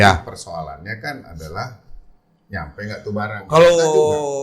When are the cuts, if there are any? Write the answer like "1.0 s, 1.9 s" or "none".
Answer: 3.4 s